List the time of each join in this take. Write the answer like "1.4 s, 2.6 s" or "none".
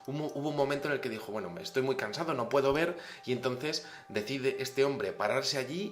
3.4 s